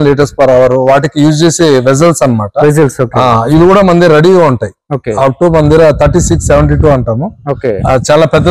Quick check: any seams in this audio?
no; 0 cuts

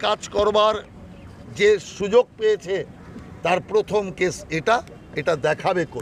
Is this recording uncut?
yes; 0 cuts

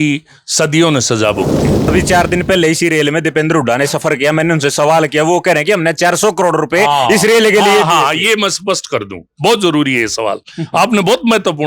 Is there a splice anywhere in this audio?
yes; 1 cut; at 1.9 s

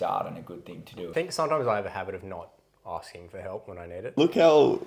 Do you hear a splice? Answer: yes; 2 cuts; at 1.1 s, 4.2 s

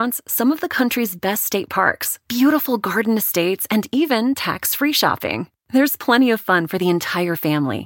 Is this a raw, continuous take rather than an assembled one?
yes; 0 cuts

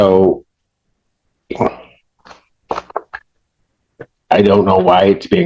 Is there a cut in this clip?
no; 0 cuts

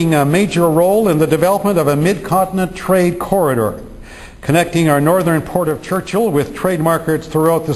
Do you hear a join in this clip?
yes; 1 cut; at 3.9 s

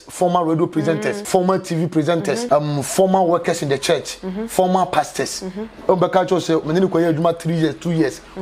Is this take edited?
yes; 2 cuts; at 1.2 s, 2.4 s

